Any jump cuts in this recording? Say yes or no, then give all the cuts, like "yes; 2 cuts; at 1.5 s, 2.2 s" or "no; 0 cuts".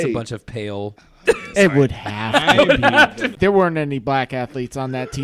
yes; 2 cuts; at 1.1 s, 3.3 s